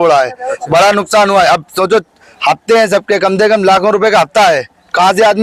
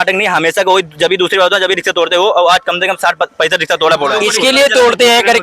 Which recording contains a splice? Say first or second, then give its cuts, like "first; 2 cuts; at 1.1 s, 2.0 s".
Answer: second; 1 cut; at 4.1 s